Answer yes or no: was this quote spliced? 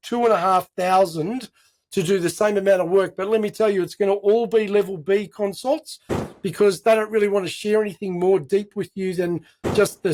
no